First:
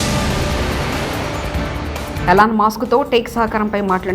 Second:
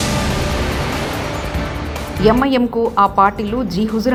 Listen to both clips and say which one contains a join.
first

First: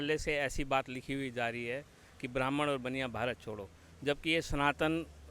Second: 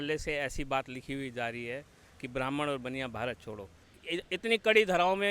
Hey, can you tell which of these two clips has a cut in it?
second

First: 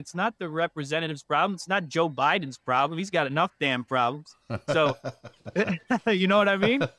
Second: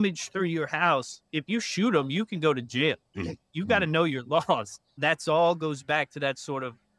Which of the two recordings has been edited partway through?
second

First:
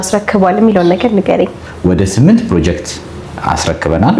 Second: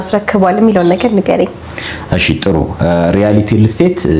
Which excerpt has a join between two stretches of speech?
first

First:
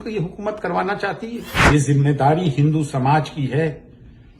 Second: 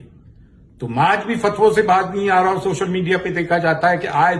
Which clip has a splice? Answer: first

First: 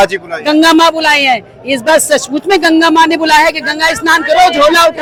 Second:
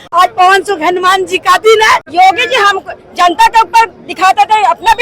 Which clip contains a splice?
second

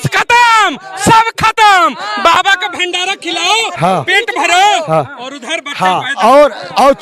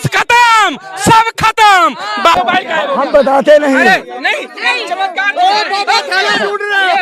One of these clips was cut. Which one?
second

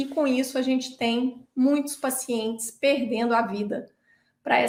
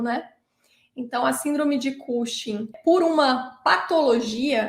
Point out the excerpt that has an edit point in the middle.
second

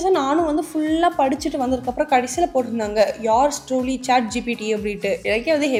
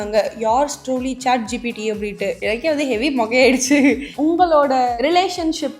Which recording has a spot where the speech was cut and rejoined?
second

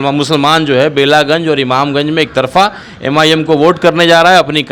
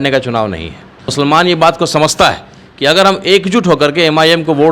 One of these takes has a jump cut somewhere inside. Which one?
second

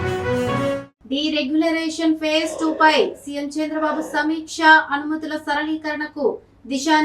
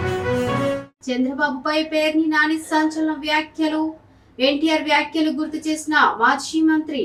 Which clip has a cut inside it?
first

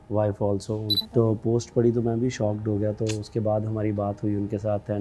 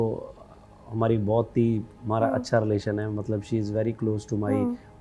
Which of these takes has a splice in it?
first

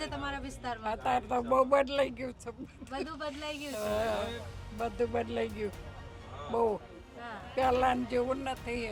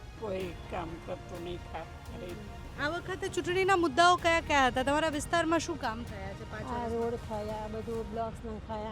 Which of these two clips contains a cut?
second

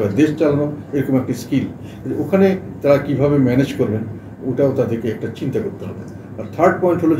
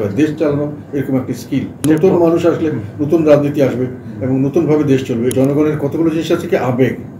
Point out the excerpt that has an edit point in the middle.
second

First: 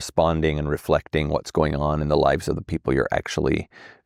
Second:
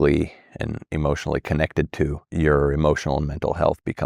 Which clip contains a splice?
second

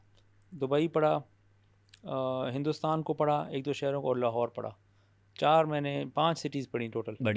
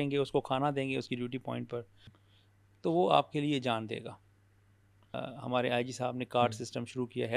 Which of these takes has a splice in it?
second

